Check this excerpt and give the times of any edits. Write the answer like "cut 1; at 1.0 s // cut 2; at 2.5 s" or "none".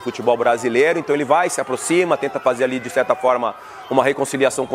none